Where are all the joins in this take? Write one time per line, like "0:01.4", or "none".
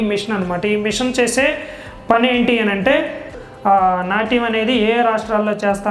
0:03.3

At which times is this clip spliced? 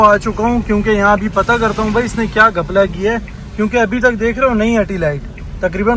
none

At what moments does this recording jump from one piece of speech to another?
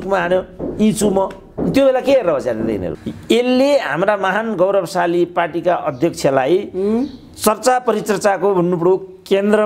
0:03.0

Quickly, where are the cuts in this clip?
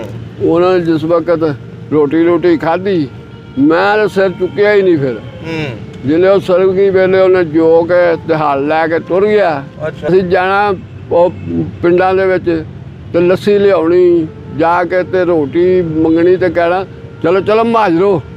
0:10.1

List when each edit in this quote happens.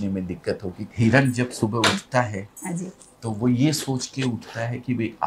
0:00.9

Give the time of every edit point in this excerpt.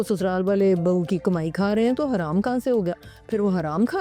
none

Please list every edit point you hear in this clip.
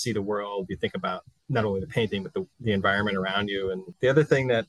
0:01.3
0:02.5
0:03.9

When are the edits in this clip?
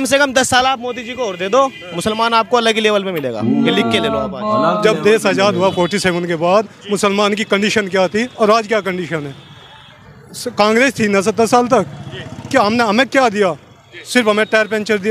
0:04.6

